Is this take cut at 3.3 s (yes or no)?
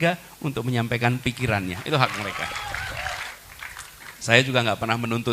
yes